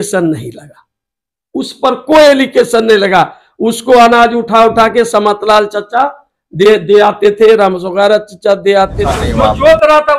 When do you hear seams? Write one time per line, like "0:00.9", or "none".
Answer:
0:09.0